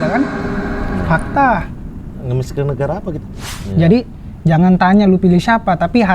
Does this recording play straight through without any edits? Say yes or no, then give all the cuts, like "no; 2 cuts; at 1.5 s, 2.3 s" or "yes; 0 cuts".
no; 1 cut; at 3.6 s